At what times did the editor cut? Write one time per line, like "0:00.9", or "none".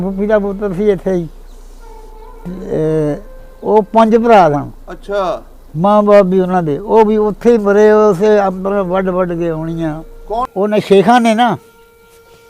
0:10.5